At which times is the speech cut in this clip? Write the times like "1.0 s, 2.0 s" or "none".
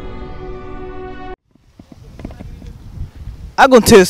none

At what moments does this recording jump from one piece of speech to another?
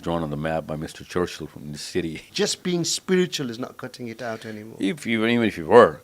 2.3 s

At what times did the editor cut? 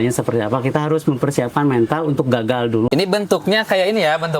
2.9 s

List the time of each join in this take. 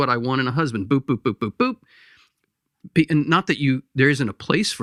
none

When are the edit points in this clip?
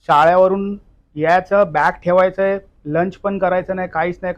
none

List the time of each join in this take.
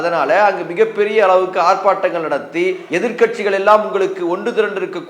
2.8 s

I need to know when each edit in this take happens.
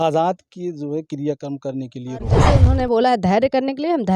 2.5 s

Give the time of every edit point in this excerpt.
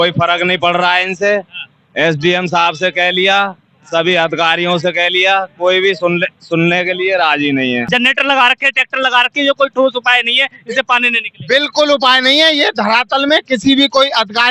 7.9 s

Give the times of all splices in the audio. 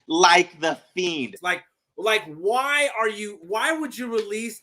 1.4 s, 3.4 s

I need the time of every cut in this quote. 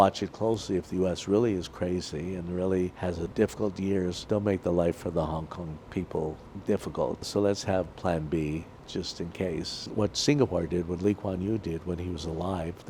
3.3 s, 4.2 s, 6.5 s, 7.3 s, 9.9 s

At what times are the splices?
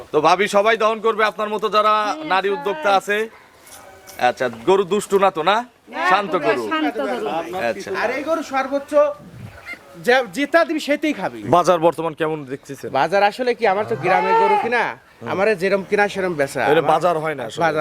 11.3 s

